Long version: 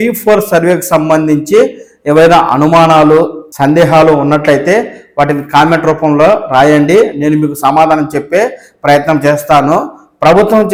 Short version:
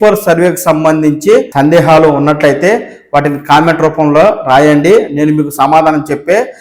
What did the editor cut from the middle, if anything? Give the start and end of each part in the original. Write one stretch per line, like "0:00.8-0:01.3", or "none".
0:01.7-0:03.5

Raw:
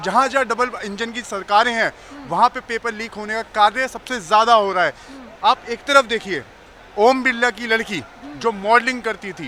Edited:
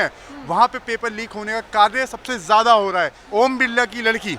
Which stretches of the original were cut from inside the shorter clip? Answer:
0:05.0-0:06.8

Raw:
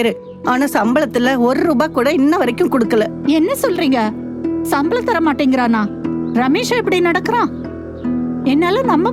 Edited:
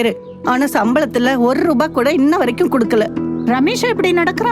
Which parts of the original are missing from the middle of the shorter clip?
0:03.1-0:06.0

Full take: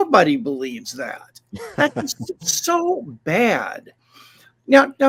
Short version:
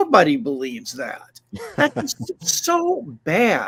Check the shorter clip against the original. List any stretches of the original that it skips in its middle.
none

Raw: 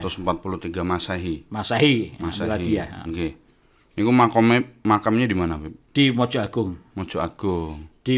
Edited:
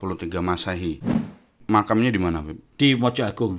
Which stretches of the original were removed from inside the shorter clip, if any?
0:01.8-0:04.6

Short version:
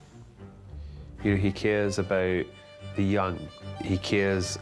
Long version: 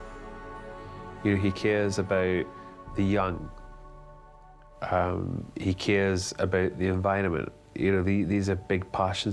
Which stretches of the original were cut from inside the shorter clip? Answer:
0:03.7-0:05.4

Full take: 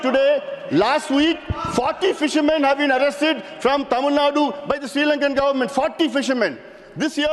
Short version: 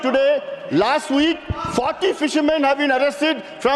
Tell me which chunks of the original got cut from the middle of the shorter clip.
none

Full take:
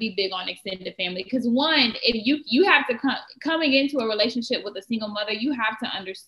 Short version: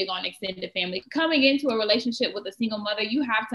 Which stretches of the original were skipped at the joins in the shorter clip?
0:01.2-0:03.3

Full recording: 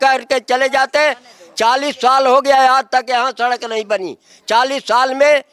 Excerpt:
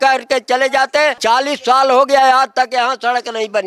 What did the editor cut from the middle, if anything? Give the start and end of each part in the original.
0:01.2-0:01.5

